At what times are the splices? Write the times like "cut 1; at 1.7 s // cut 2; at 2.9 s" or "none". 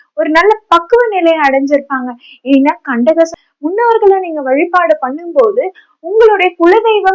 cut 1; at 3.4 s